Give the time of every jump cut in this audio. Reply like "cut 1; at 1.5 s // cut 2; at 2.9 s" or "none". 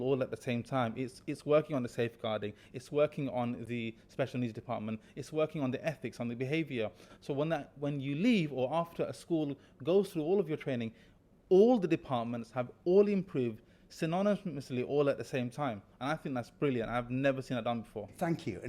none